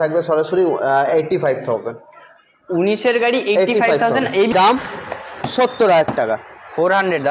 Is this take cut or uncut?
cut